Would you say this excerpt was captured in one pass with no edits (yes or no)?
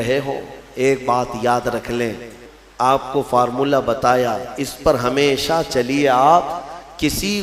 no